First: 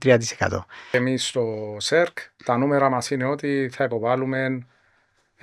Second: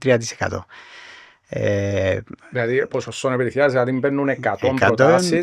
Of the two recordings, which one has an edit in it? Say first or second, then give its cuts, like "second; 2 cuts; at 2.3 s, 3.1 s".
first; 1 cut; at 0.9 s